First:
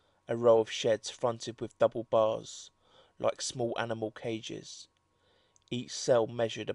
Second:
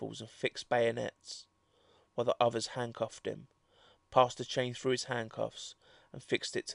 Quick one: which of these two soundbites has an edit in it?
first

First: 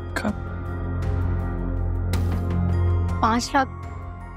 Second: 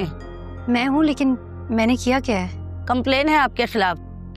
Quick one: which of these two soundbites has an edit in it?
first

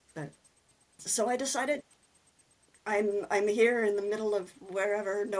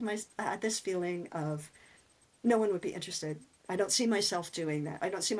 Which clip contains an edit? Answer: first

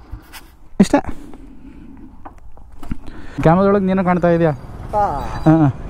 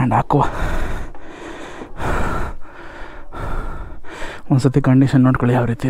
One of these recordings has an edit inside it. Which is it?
first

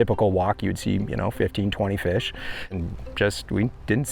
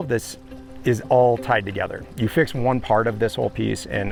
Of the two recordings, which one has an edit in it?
first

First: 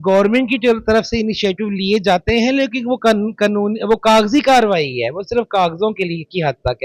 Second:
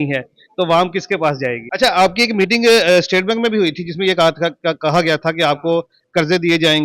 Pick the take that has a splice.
second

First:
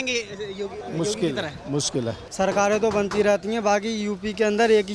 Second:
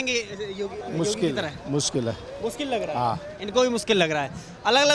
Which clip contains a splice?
first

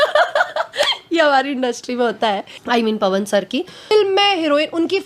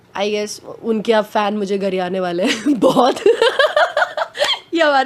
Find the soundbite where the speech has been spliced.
first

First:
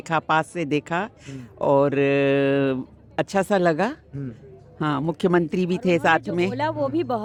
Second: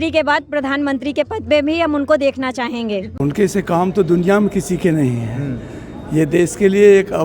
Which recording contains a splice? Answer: second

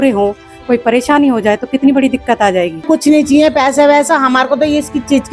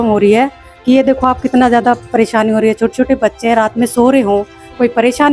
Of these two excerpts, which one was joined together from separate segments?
first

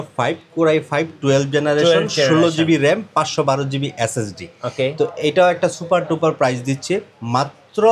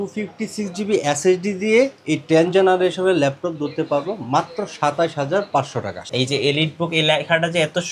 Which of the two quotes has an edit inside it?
second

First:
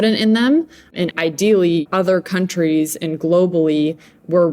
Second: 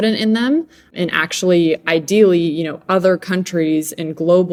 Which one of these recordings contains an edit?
first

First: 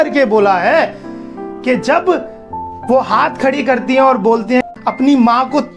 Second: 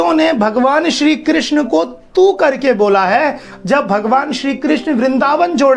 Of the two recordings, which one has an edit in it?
first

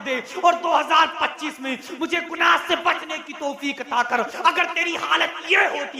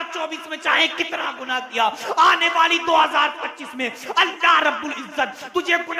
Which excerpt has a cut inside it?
first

